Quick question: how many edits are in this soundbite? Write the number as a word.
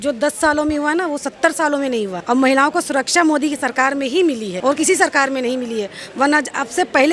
two